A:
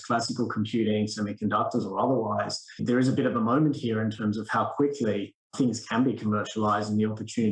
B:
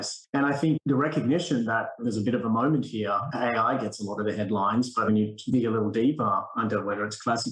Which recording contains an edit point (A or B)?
A